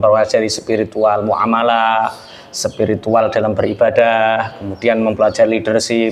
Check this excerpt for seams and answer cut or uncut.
uncut